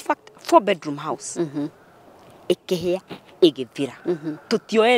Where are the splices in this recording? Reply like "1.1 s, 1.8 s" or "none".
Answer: none